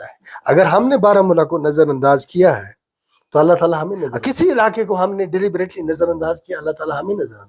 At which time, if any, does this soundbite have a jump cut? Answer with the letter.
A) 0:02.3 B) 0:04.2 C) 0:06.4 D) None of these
B